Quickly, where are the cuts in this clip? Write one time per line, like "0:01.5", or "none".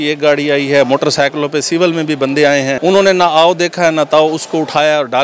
0:02.8